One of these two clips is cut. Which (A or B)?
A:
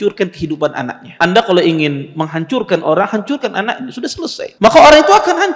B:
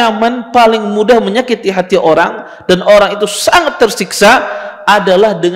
A